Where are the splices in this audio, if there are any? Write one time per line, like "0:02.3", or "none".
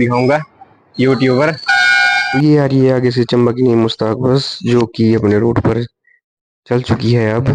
0:02.2